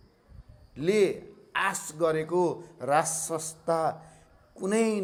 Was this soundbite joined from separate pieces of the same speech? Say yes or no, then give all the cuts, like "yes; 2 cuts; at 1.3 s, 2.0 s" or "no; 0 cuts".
no; 0 cuts